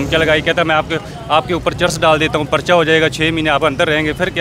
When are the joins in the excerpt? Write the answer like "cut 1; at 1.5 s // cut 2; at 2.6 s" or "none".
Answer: none